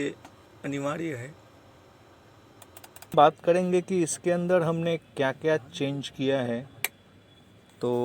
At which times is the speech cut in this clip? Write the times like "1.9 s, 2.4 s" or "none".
3.1 s